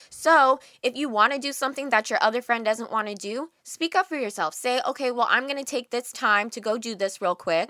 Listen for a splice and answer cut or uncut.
uncut